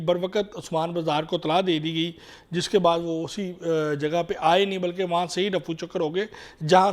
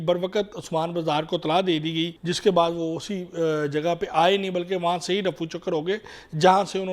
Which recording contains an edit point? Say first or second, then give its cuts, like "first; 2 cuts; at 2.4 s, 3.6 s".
second; 1 cut; at 2.2 s